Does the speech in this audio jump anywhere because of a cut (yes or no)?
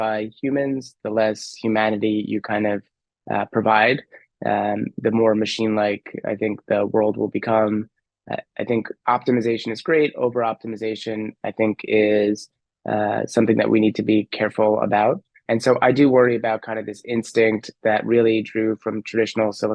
no